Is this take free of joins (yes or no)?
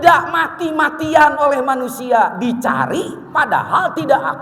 yes